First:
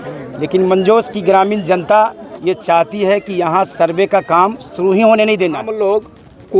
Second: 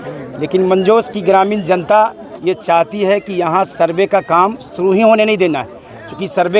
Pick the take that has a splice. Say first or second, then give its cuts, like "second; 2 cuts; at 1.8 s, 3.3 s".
first; 1 cut; at 5.6 s